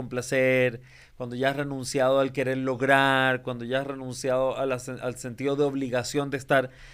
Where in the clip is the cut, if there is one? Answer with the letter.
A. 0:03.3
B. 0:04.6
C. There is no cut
C